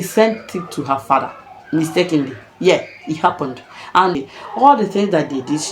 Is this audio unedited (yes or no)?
no